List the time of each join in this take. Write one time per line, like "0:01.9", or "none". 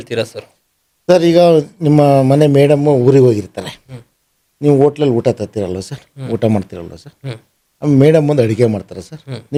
none